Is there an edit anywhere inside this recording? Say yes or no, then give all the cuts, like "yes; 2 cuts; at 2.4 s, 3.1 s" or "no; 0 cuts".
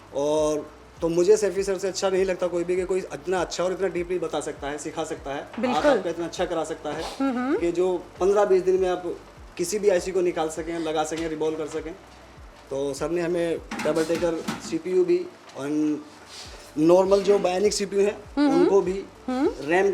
no; 0 cuts